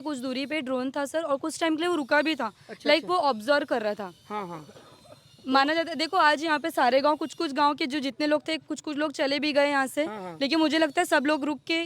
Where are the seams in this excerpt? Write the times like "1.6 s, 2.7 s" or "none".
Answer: none